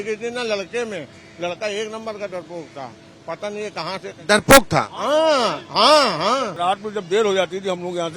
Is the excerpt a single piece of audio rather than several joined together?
no; 1 cut; at 6.5 s

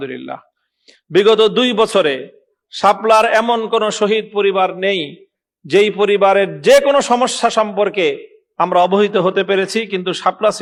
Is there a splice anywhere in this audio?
no; 0 cuts

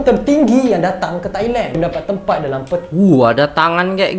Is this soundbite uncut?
no; 1 cut; at 1.8 s

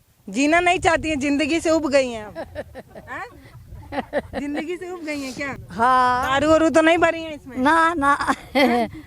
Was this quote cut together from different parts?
yes; 1 cut; at 5.6 s

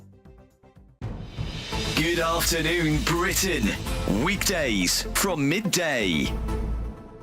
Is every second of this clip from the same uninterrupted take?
no; 1 cut; at 0.9 s

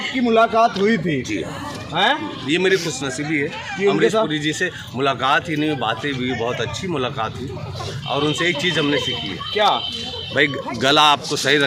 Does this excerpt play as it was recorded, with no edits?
yes; 0 cuts

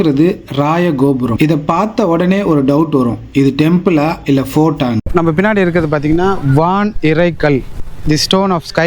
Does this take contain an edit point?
yes; 2 cuts; at 1.4 s, 5.1 s

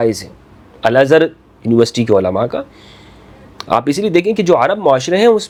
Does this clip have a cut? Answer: no; 0 cuts

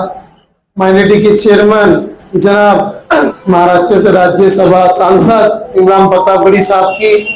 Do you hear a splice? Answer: yes; 1 cut; at 3.3 s

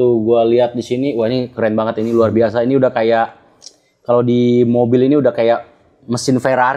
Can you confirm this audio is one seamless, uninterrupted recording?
yes; 0 cuts

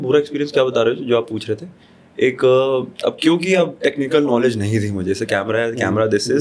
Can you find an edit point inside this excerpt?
no; 0 cuts

